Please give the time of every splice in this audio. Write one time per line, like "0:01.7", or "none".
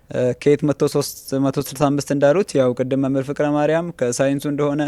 none